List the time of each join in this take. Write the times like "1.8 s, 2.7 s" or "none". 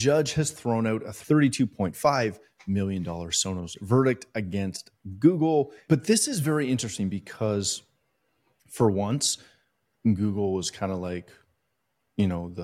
1.1 s, 5.8 s